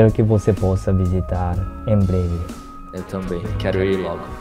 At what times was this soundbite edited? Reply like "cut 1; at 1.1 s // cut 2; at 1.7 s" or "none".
none